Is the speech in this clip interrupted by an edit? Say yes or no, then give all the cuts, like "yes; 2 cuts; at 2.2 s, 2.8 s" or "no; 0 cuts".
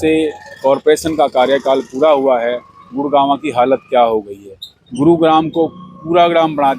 no; 0 cuts